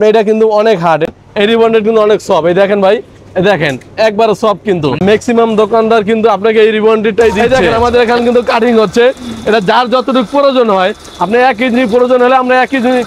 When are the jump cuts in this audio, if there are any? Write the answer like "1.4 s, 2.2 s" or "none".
1.1 s, 5.0 s, 7.5 s